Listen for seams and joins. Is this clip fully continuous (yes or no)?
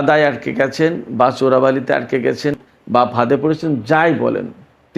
no